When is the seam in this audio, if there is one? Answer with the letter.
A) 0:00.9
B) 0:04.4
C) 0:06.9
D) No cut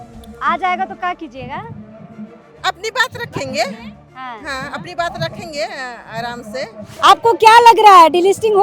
C